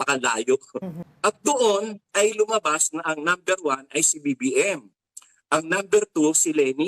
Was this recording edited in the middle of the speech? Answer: yes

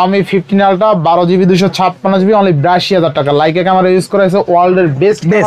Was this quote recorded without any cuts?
yes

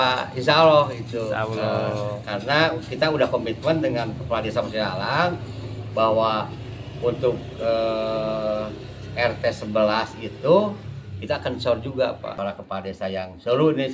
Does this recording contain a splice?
yes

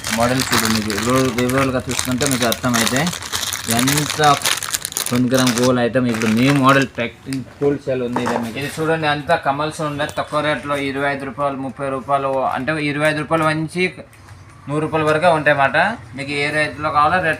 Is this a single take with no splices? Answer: no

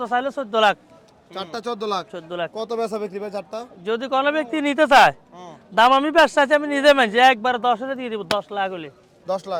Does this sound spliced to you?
no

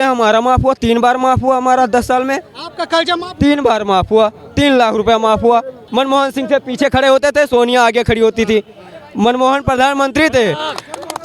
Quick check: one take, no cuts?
no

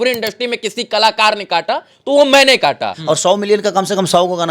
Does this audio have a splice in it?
yes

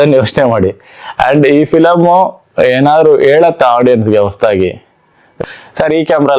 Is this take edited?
yes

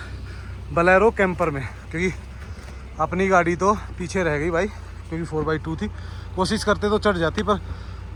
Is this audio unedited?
yes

